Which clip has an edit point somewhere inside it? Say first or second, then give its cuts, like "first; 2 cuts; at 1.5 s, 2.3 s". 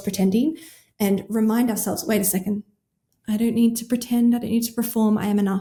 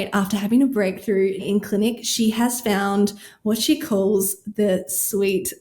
second; 1 cut; at 1.4 s